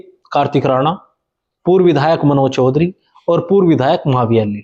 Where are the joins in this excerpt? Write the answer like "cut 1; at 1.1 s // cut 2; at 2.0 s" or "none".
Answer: none

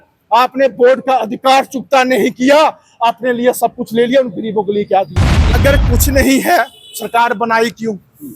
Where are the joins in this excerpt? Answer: cut 1; at 5.6 s

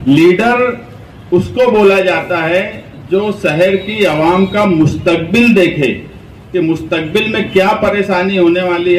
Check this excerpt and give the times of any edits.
none

